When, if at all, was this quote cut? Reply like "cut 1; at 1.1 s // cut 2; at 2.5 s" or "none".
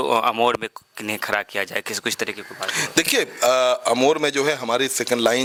none